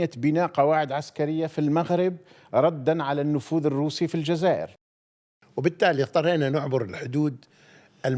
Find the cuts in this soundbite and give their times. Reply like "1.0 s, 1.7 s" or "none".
5.0 s